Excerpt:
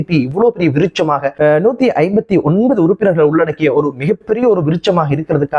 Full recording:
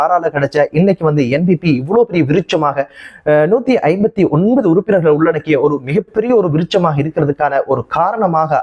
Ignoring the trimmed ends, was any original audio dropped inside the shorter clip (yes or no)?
yes